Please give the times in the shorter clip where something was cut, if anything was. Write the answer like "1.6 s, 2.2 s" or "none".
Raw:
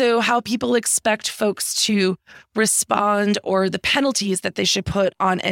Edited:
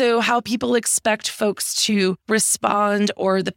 2.2 s